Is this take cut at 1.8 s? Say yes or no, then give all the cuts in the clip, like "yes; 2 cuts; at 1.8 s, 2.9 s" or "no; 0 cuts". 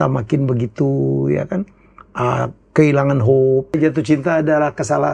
no; 1 cut; at 3.8 s